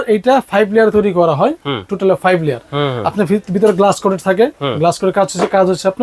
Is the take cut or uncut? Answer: uncut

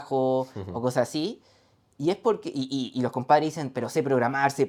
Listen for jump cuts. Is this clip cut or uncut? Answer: uncut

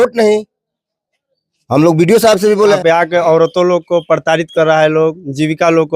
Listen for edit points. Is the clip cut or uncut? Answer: cut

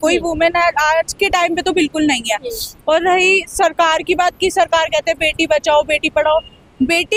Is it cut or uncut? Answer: uncut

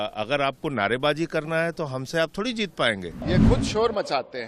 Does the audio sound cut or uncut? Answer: cut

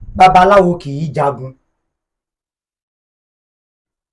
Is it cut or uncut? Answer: uncut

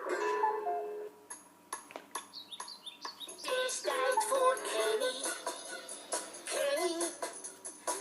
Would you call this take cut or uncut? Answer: cut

